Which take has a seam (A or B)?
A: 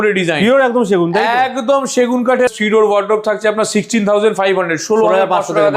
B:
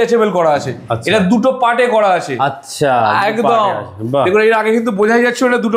A